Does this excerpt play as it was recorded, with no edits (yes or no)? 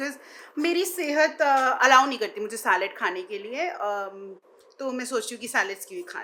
yes